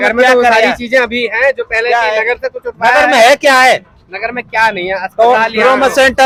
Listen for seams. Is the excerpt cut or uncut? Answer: uncut